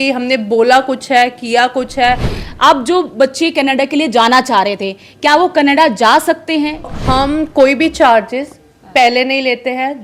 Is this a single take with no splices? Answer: no; 2 cuts; at 2.3 s, 6.9 s

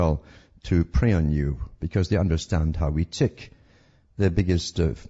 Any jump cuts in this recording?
no; 0 cuts

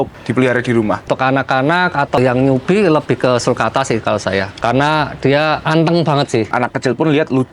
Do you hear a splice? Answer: yes; 5 cuts; at 1.1 s, 2.2 s, 4.5 s, 5.6 s, 6.5 s

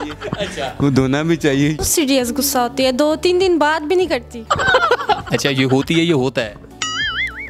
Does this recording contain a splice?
yes; 2 cuts; at 1.8 s, 4.4 s

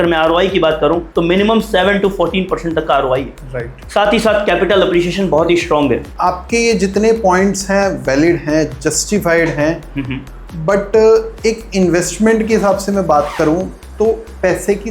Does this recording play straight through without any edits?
no; 1 cut; at 6.1 s

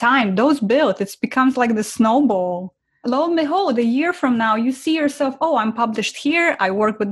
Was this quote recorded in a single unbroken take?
yes; 0 cuts

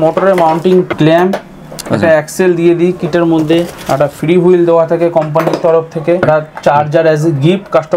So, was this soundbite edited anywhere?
yes; 3 cuts; at 0.9 s, 3.7 s, 6.2 s

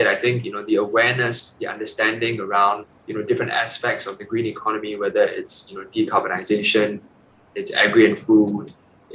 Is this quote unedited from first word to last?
no; 1 cut; at 3.0 s

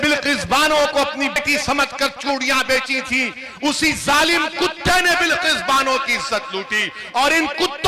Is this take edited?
yes; 1 cut; at 1.4 s

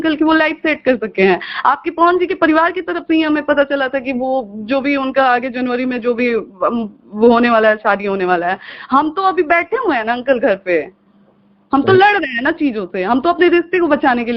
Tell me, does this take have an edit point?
no; 0 cuts

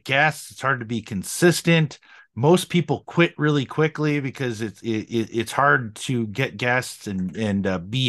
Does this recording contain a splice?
no; 0 cuts

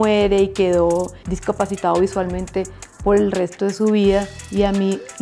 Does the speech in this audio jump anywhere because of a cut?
yes; 1 cut; at 1.2 s

